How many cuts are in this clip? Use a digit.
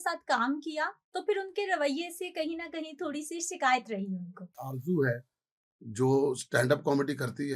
1